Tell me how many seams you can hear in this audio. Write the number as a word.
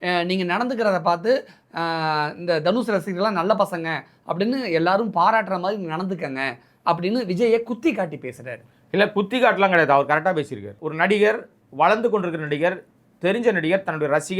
one